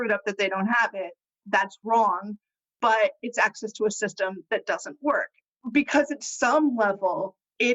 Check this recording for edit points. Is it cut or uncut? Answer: cut